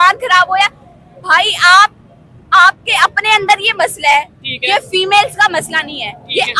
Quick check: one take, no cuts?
yes; 0 cuts

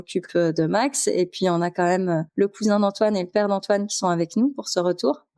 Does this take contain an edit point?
yes; 1 cut; at 2.3 s

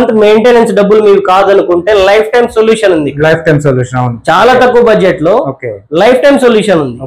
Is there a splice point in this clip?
no; 0 cuts

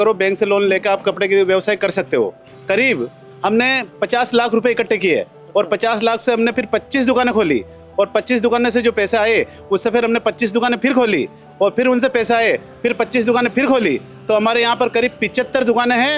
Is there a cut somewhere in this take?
yes; 1 cut; at 2.5 s

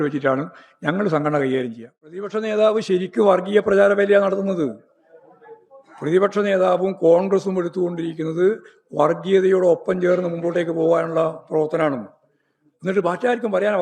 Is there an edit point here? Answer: yes; 1 cut; at 2.3 s

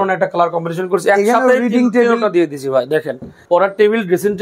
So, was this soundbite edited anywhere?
yes; 1 cut; at 3.3 s

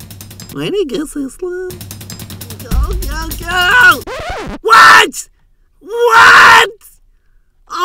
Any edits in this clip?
yes; 1 cut; at 1.7 s

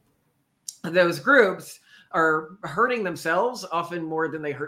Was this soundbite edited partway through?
no; 0 cuts

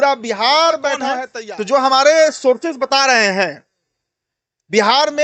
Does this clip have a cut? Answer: yes; 1 cut; at 1.3 s

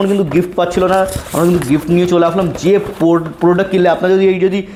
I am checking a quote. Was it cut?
no; 0 cuts

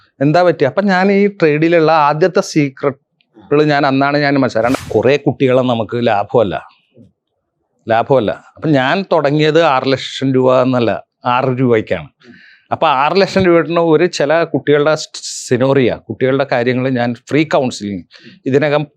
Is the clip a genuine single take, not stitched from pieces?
no; 1 cut; at 4.7 s

